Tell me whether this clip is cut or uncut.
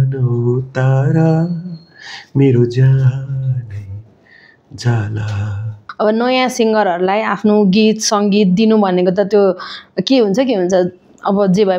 cut